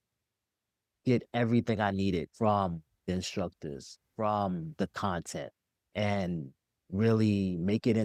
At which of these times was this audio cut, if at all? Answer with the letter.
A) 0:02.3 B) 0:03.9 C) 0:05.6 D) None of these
A